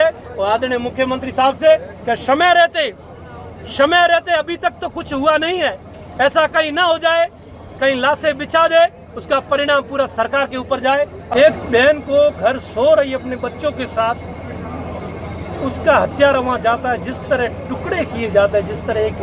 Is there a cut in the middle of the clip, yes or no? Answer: yes